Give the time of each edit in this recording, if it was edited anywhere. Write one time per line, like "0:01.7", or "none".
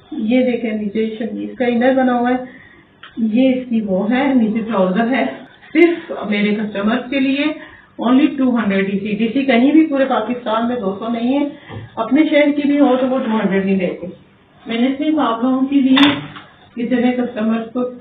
0:05.4